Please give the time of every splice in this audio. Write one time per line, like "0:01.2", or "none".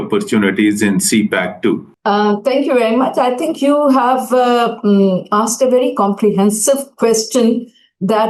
none